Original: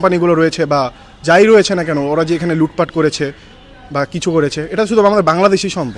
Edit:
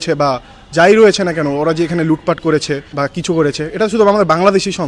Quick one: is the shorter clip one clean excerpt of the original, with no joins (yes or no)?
no